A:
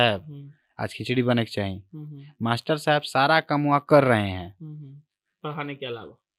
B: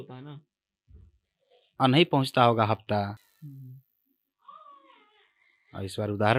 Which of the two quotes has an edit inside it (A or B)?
B